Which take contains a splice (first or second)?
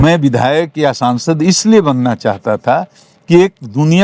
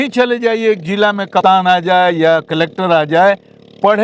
second